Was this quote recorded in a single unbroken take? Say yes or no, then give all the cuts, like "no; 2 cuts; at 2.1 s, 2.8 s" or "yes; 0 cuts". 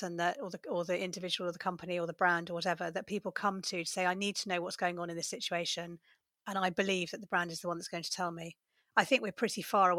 yes; 0 cuts